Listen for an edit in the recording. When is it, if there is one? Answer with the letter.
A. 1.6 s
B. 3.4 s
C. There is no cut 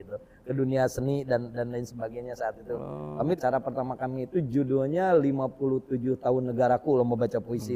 B